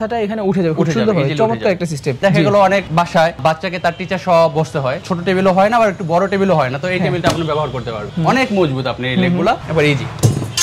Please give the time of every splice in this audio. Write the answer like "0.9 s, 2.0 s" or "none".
2.2 s, 5.0 s, 8.0 s, 9.6 s